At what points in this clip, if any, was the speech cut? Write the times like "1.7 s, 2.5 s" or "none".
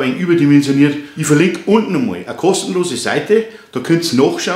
1.1 s